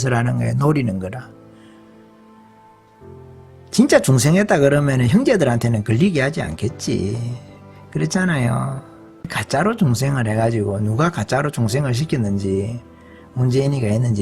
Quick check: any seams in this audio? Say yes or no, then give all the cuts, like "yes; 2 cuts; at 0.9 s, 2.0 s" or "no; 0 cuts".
yes; 1 cut; at 9.4 s